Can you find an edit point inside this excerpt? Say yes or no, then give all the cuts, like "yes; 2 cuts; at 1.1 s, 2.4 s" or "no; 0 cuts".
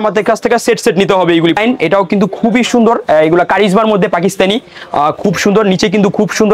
no; 0 cuts